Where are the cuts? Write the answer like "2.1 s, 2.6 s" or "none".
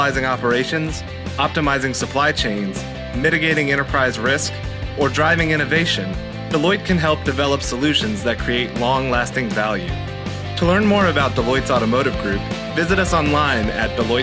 none